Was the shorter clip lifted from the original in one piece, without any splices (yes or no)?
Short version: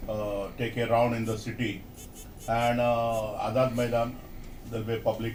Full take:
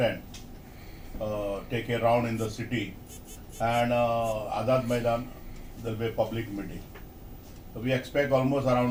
yes